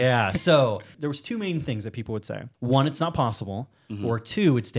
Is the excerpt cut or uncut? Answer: cut